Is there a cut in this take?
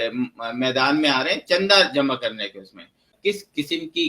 yes; 1 cut; at 3.1 s

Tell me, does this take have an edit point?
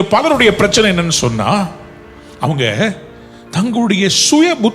no; 0 cuts

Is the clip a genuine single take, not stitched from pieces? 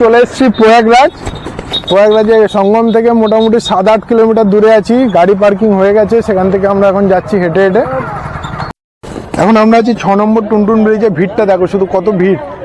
no; 1 cut; at 8.7 s

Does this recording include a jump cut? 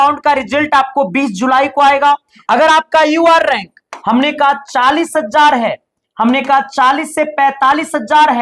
yes; 1 cut; at 2.3 s

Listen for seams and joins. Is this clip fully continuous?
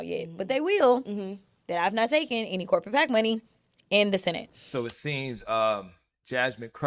no; 1 cut; at 4.5 s

